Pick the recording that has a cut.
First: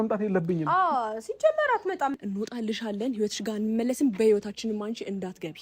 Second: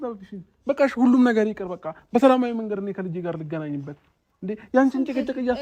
first; 1 cut; at 2.1 s

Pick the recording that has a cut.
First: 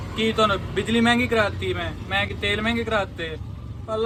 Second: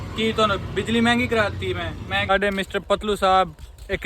second; 1 cut; at 2.3 s

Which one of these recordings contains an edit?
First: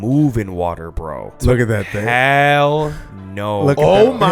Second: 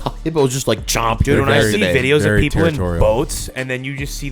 first; 1 cut; at 1.4 s

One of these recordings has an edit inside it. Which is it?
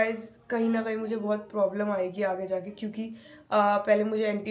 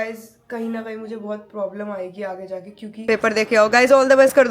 second; 1 cut; at 2.9 s

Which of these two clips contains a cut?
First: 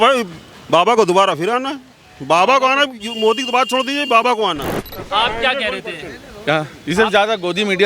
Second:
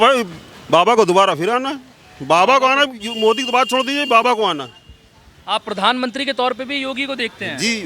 first; 1 cut; at 4.9 s

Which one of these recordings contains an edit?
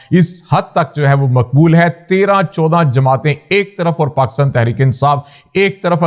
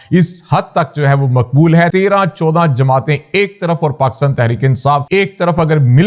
second; 2 cuts; at 1.9 s, 5.1 s

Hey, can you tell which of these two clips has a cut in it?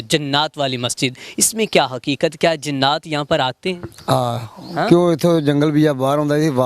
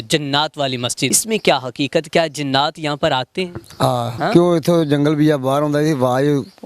second; 2 cuts; at 1.2 s, 4.1 s

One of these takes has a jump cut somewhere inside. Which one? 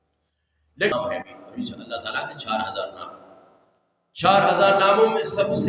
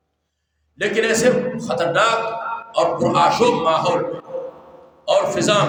first; 1 cut; at 0.9 s

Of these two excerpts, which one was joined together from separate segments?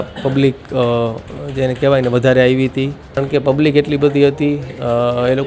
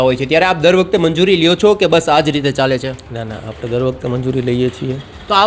first; 1 cut; at 3.2 s

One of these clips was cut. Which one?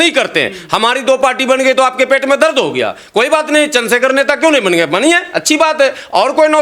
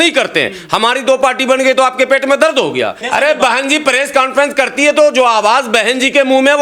second; 1 cut; at 3.0 s

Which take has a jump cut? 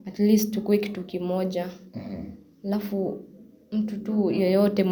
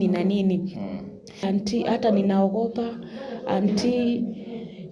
second; 1 cut; at 1.4 s

